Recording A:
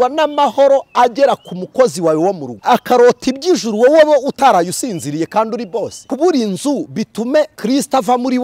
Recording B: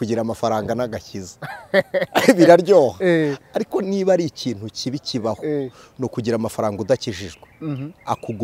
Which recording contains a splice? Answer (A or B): A